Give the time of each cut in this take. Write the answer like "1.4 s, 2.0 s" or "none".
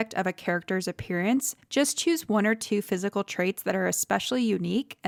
none